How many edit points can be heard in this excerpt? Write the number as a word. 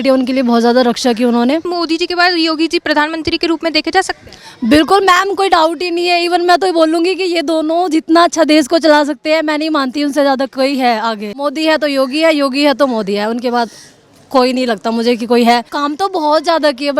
three